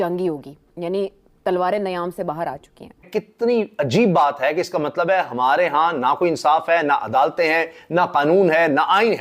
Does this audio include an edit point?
yes; 1 cut; at 3.1 s

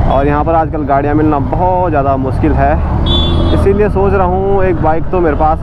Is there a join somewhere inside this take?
no; 0 cuts

